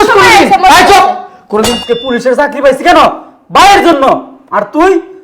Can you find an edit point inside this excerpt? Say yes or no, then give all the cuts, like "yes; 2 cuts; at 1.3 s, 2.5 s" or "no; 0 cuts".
yes; 1 cut; at 1.7 s